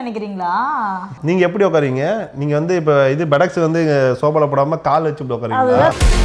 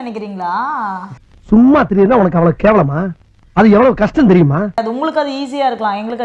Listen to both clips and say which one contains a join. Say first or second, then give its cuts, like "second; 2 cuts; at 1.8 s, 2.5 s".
first; 1 cut; at 1.2 s